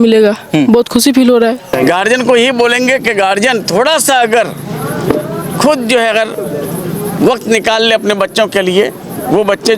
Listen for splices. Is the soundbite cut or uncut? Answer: cut